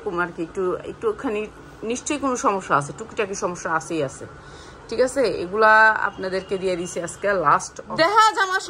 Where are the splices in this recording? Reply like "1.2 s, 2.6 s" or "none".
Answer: 7.8 s